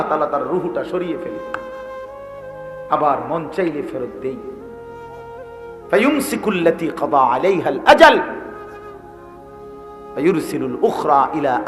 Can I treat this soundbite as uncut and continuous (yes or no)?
no